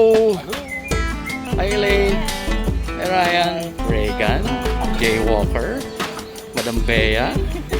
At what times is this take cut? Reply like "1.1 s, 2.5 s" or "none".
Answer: 1.4 s, 3.8 s